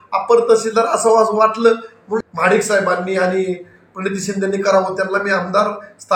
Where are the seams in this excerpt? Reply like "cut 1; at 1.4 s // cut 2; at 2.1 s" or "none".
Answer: cut 1; at 2.2 s